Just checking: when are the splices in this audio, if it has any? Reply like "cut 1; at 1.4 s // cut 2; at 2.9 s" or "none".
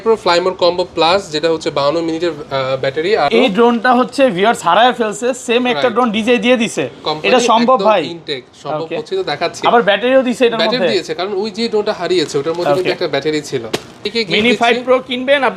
cut 1; at 3.3 s // cut 2; at 14.1 s